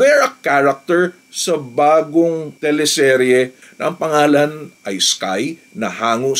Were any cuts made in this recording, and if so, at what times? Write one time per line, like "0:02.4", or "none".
0:03.6
0:04.8

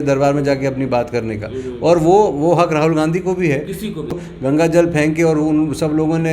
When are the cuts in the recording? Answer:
0:04.1

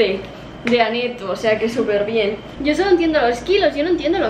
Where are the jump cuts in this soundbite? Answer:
0:02.5

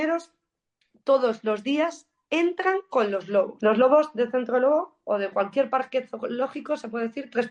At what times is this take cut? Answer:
0:03.5

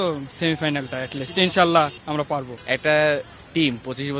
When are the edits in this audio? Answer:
0:02.5

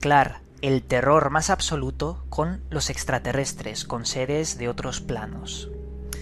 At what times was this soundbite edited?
0:03.4

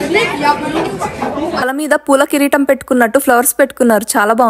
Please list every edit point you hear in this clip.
0:01.6

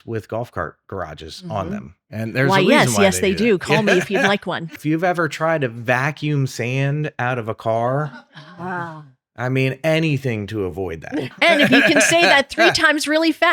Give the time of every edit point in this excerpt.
0:04.7
0:11.2

